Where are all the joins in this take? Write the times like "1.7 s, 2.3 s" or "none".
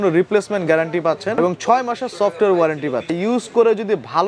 1.4 s, 3.1 s